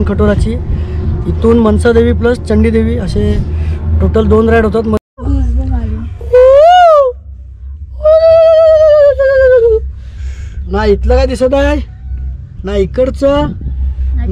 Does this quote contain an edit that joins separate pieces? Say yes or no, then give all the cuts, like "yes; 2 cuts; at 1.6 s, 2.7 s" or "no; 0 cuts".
yes; 1 cut; at 5.0 s